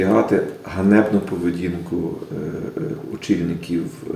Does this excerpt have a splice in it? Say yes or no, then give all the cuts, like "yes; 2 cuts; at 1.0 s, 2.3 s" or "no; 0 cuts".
no; 0 cuts